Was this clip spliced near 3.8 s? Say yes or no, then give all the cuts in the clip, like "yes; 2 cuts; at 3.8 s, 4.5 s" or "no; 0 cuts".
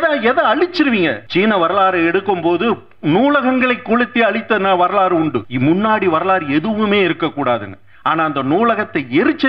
no; 2 cuts; at 1.2 s, 5.5 s